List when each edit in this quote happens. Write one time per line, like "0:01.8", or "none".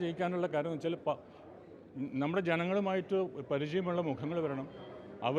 none

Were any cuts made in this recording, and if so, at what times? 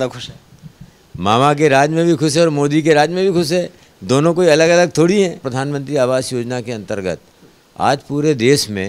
0:05.5

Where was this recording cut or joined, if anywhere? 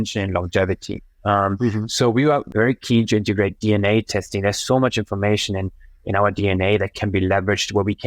0:02.5

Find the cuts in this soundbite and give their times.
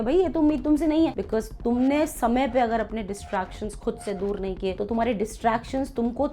0:01.1

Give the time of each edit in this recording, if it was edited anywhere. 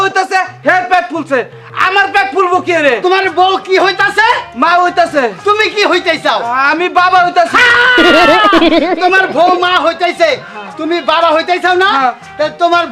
none

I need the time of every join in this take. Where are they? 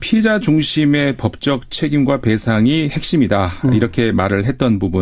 0:03.6

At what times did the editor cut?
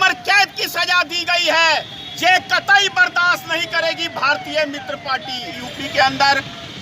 0:05.5

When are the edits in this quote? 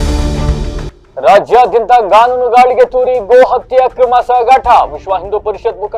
0:00.9

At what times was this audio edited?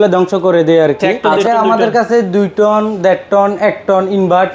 0:01.3

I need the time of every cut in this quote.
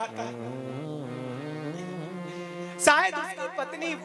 none

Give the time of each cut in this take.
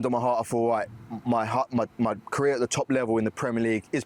none

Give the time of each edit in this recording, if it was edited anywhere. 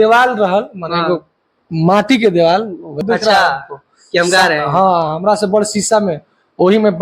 0:03.0

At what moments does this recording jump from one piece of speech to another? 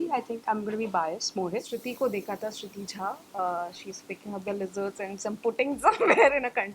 0:01.7

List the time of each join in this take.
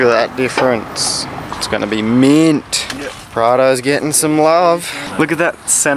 0:01.5
0:05.0

